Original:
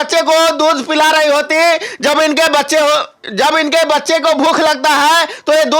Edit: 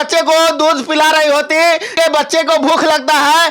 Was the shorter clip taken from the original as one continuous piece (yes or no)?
no